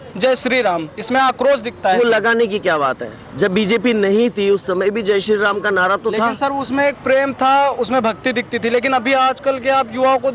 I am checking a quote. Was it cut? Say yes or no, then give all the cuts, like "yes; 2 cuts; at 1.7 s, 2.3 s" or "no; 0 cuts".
no; 0 cuts